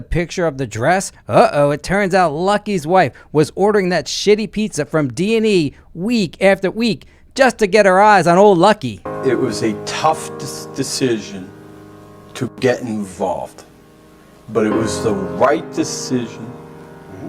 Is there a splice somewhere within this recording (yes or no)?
yes